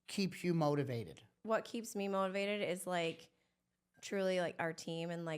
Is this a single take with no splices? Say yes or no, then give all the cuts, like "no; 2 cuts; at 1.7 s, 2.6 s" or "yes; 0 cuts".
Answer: no; 1 cut; at 1.3 s